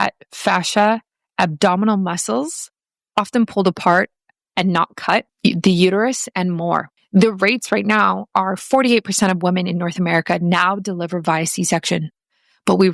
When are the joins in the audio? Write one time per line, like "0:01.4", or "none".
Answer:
0:05.3
0:07.0